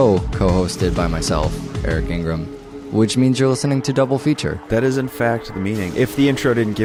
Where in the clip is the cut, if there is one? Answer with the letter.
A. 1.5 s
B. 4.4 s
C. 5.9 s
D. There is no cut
D